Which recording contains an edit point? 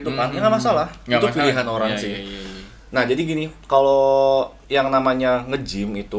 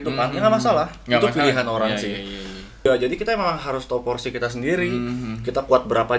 second; 1 cut; at 2.9 s

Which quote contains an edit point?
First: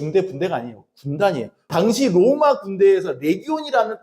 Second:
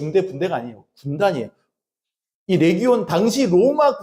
first; 1 cut; at 1.7 s

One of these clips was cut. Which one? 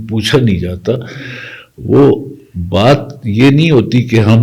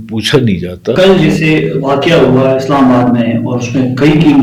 second; 1 cut; at 1.0 s

